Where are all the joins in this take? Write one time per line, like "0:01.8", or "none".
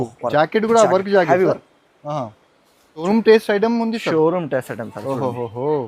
0:03.0